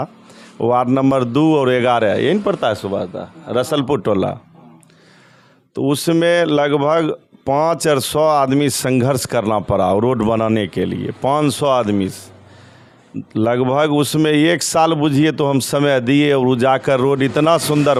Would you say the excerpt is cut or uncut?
uncut